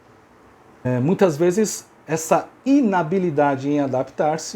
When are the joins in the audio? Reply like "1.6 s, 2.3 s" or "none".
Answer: 0.9 s, 2.5 s